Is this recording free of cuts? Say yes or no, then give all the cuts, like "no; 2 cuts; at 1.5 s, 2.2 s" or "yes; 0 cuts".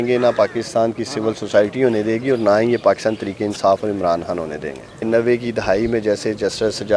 no; 1 cut; at 5.0 s